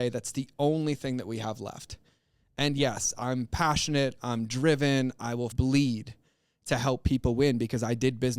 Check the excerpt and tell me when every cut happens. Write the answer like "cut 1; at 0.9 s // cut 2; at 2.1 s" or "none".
cut 1; at 5.5 s